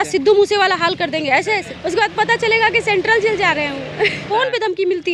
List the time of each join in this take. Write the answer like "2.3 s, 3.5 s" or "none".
1.7 s, 4.3 s